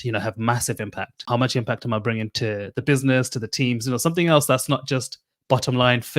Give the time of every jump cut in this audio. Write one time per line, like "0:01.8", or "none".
0:01.2